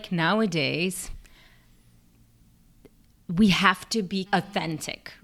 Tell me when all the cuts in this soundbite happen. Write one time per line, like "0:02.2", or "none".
none